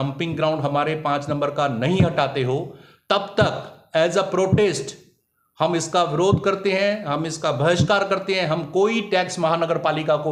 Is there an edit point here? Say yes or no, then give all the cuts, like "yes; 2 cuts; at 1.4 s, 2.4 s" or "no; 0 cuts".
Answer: no; 0 cuts